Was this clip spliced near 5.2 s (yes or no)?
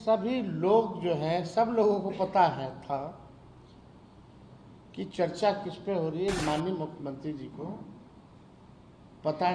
no